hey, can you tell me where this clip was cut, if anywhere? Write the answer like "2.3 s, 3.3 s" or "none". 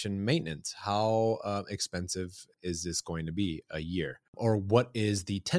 2.5 s, 4.2 s

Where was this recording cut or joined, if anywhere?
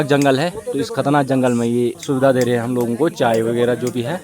2.0 s

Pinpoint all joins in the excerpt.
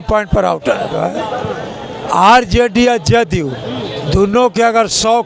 0.9 s

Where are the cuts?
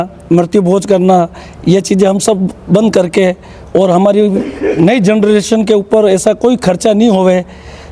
none

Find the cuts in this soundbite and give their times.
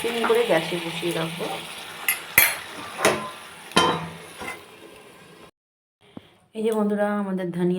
6.2 s

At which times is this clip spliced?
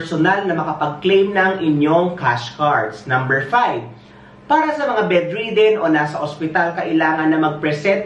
none

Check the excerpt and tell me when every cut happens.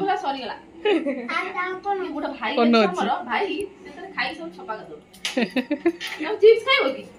none

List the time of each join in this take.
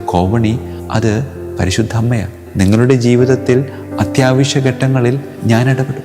2.4 s

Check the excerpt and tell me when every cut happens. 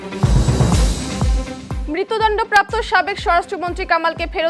1.8 s

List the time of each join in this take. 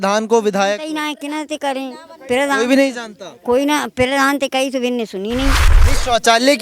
5.7 s

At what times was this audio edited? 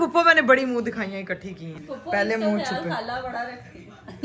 1.7 s

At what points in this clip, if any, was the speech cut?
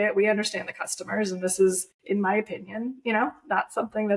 1.9 s

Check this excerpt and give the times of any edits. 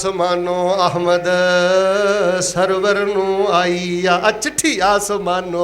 none

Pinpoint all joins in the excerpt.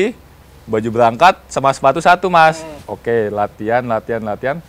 2.9 s

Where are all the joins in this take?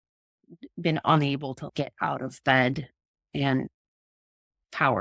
none

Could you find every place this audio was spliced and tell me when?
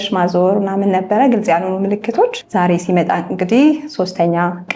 2.4 s

